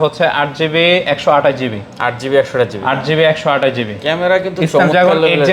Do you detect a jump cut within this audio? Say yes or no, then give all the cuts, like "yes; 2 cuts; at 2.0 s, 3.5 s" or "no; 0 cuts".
no; 0 cuts